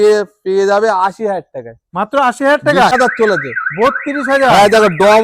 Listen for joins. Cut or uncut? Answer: cut